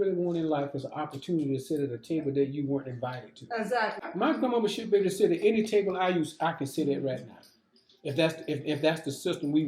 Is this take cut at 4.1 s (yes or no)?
yes